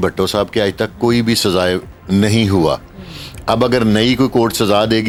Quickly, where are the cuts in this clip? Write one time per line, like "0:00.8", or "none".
none